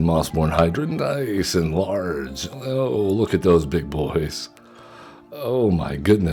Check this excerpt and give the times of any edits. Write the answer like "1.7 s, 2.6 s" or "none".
none